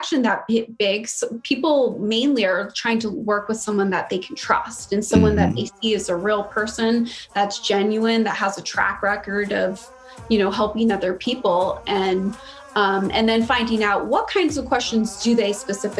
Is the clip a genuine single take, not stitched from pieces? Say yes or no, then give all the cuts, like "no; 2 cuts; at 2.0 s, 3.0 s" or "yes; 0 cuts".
yes; 0 cuts